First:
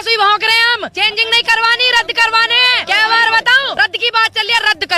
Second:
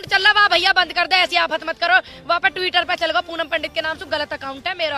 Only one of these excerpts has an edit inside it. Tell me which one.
first; 3 cuts; at 0.9 s, 2.8 s, 3.8 s

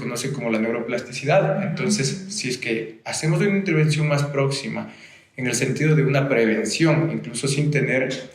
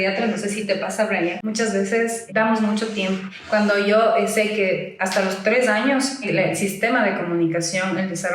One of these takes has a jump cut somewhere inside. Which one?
second; 4 cuts; at 1.4 s, 2.2 s, 3.3 s, 6.3 s

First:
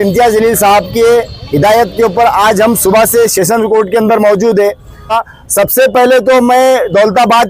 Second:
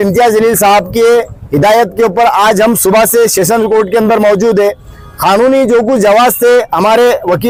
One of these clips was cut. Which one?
first; 1 cut; at 5.2 s

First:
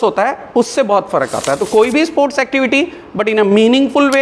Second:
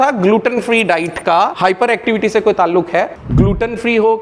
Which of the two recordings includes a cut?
second; 2 cuts; at 1.5 s, 3.2 s

